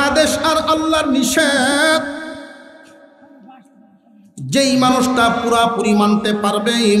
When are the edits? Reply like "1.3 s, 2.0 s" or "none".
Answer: 3.9 s